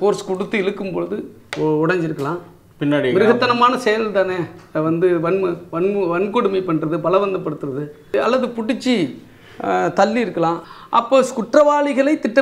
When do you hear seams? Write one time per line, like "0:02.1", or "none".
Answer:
0:08.1
0:10.7